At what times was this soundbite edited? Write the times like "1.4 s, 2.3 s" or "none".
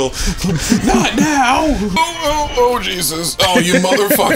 1.9 s